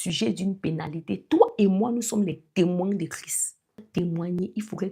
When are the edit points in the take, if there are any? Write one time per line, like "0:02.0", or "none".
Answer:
0:03.9